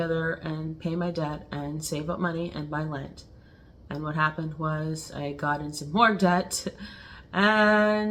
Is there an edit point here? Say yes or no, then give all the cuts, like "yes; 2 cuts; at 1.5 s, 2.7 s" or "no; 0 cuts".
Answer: no; 0 cuts